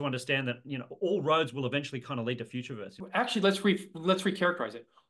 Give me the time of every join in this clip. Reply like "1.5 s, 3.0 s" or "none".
2.9 s